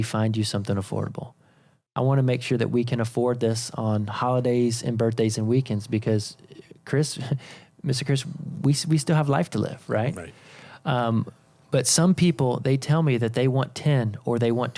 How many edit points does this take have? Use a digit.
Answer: 0